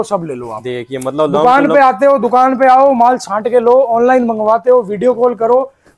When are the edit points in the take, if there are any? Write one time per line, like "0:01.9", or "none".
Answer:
none